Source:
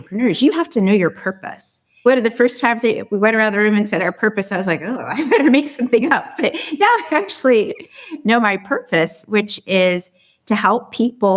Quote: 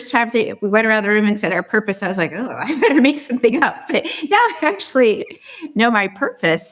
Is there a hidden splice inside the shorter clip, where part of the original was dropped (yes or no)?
no